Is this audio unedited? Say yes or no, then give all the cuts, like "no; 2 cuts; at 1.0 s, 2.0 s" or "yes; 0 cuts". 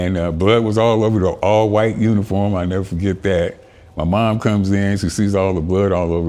yes; 0 cuts